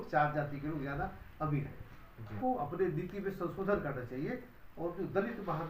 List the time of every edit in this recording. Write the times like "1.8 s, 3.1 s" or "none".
2.4 s